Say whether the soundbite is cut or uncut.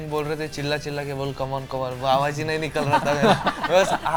uncut